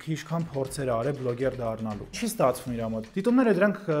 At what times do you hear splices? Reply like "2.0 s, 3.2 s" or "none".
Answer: 2.2 s, 3.0 s